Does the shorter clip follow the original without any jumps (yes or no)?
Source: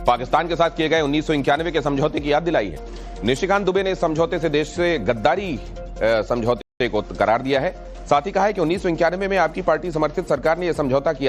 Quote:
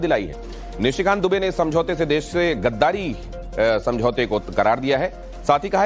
no